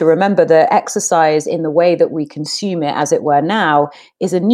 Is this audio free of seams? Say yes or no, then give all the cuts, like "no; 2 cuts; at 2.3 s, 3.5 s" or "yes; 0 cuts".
yes; 0 cuts